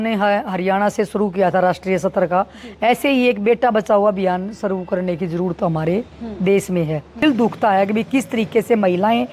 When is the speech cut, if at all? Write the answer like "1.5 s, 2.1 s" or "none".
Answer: 7.2 s

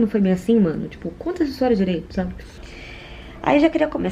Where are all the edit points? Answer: 2.7 s

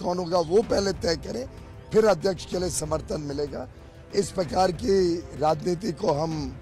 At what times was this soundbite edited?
none

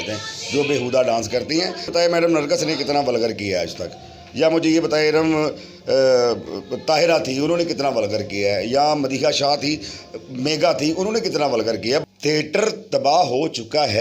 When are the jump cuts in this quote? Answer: 1.9 s, 12.0 s

